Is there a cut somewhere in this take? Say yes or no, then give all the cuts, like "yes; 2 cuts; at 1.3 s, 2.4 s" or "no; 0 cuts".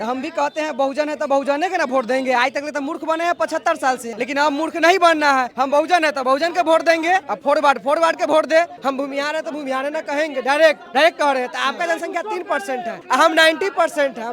yes; 6 cuts; at 4.1 s, 5.5 s, 7.3 s, 8.8 s, 10.8 s, 13.0 s